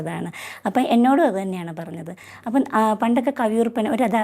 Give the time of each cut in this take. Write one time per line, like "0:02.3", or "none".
none

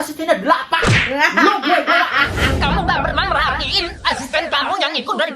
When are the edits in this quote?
none

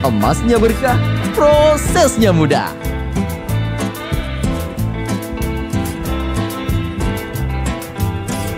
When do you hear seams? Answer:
none

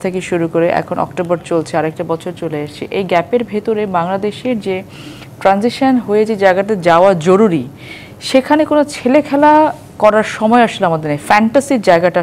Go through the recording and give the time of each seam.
none

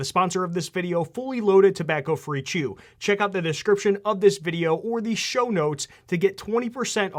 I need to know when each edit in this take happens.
none

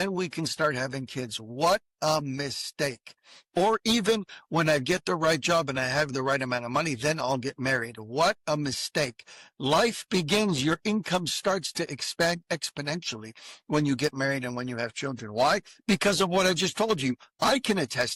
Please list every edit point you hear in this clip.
none

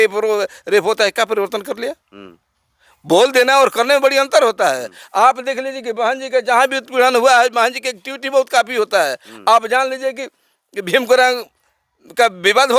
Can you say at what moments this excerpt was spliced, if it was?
none

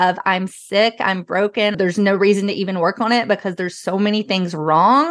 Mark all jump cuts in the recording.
0:01.7

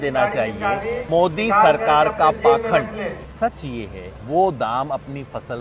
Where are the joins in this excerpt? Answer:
0:01.0
0:03.2
0:04.1

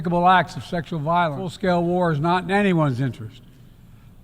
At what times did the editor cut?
0:01.5

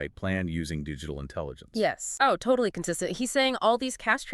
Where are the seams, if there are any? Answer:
0:02.1

